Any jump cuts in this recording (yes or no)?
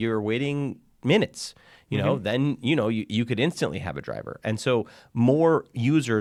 no